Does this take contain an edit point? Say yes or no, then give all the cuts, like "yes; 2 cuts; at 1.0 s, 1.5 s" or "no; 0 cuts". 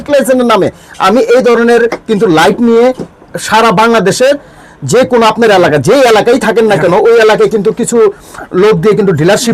no; 0 cuts